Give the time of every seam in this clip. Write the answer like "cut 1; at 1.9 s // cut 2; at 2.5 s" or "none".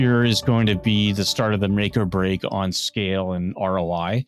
none